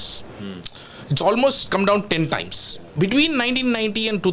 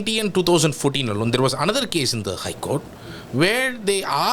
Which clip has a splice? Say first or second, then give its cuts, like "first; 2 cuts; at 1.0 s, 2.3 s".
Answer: first; 1 cut; at 2.9 s